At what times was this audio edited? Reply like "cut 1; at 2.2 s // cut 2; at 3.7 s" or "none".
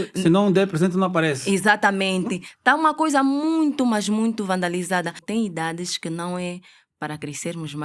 cut 1; at 5.2 s